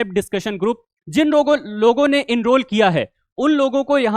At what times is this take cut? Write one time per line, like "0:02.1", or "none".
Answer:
none